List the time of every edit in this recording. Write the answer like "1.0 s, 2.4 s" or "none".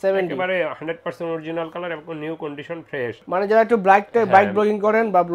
3.2 s